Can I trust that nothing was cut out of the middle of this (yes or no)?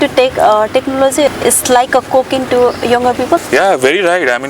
no